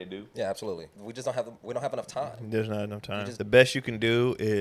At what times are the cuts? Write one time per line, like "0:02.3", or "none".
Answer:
0:01.0
0:03.3